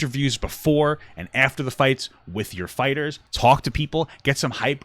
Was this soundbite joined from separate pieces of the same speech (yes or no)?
yes